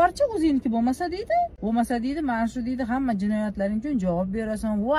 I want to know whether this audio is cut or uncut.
cut